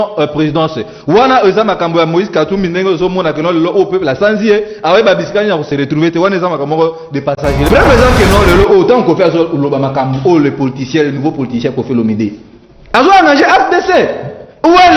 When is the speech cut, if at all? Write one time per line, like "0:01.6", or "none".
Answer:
0:07.7